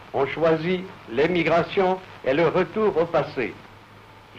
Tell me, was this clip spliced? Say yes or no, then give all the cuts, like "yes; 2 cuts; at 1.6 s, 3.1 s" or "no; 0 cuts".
no; 0 cuts